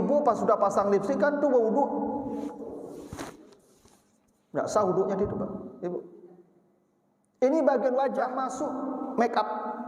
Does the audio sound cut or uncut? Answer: cut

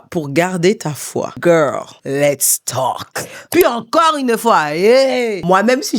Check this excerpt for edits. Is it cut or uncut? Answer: cut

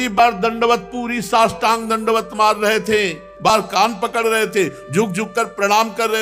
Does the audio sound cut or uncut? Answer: cut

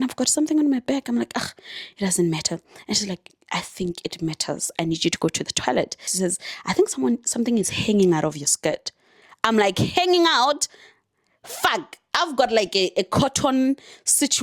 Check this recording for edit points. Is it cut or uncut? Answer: cut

